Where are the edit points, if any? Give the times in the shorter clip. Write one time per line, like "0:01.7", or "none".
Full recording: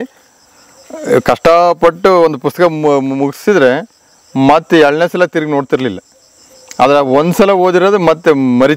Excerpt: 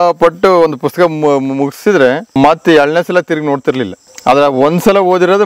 0:02.3
0:04.0